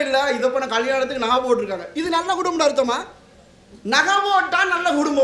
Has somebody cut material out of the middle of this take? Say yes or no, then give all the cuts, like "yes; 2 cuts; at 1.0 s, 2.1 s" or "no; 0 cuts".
no; 0 cuts